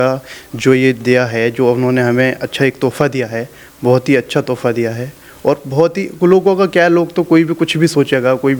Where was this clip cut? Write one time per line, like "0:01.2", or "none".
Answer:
none